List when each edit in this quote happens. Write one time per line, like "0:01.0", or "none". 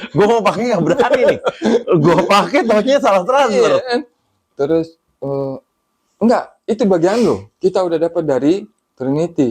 none

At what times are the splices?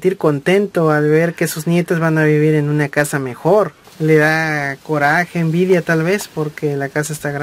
0:03.8

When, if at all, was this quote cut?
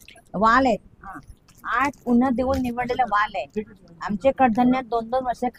none

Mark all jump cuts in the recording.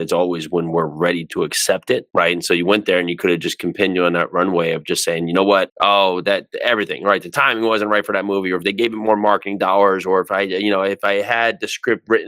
0:02.1

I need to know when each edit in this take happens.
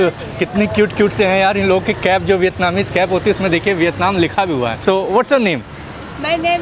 0:04.8

